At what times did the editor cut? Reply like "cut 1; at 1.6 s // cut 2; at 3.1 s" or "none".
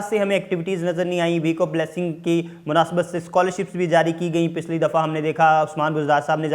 none